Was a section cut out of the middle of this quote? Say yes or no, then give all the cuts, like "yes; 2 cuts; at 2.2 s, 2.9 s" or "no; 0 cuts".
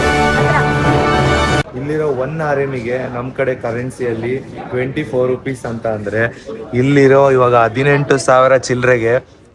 yes; 1 cut; at 1.6 s